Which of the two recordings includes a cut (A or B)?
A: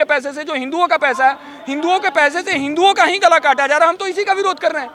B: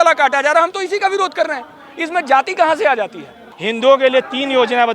B